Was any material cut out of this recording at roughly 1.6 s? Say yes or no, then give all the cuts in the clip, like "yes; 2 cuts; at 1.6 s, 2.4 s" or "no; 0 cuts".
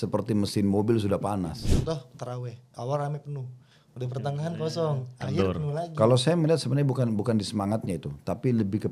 yes; 1 cut; at 1.6 s